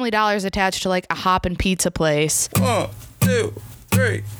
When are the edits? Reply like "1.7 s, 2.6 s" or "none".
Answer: 2.4 s